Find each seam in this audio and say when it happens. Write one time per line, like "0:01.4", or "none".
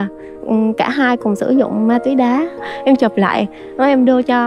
0:02.6